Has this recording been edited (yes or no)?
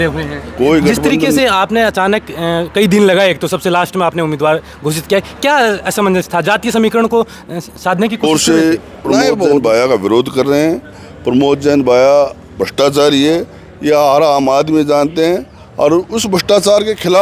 yes